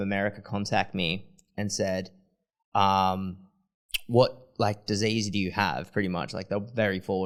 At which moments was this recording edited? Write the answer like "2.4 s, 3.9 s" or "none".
none